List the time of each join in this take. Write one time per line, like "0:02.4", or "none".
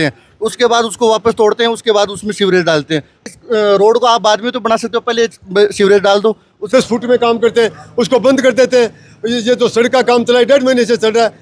0:03.3
0:06.5